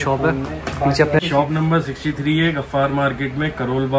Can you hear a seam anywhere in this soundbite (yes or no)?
yes